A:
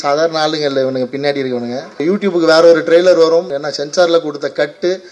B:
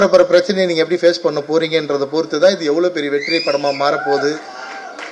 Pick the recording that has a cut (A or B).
A